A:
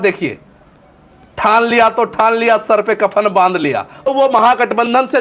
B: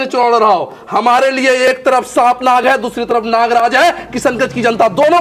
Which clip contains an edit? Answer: A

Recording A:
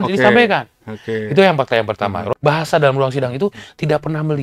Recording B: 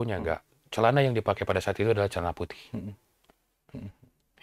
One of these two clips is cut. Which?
A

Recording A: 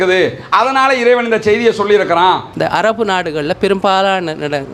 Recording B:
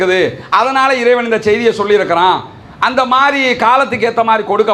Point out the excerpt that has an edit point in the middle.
A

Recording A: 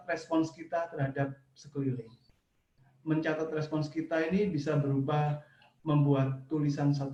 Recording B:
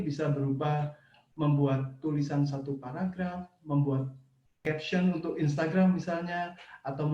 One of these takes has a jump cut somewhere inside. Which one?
B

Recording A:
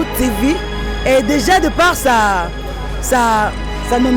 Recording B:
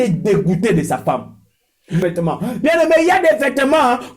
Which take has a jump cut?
B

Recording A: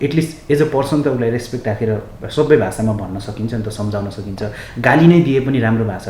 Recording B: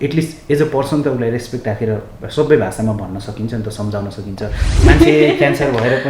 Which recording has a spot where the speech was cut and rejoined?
B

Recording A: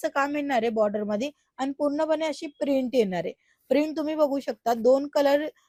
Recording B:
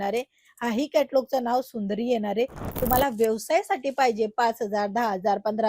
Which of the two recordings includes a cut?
B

